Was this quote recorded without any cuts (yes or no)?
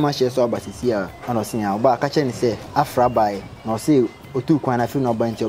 no